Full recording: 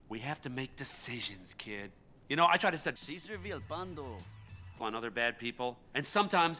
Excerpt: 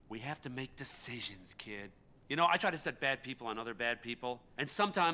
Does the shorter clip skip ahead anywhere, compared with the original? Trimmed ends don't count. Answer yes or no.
yes